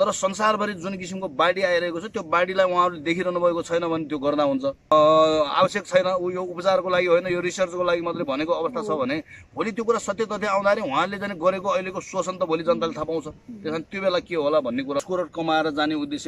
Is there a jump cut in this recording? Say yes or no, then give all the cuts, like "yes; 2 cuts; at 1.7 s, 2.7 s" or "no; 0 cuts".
yes; 2 cuts; at 4.9 s, 15.0 s